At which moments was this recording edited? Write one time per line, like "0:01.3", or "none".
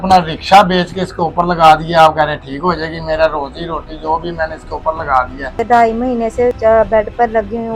0:05.6
0:06.6